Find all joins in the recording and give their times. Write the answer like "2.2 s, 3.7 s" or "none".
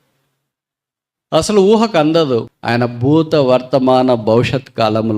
2.5 s